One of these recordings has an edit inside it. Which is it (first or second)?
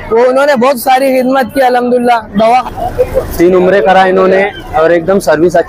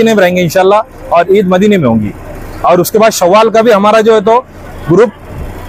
first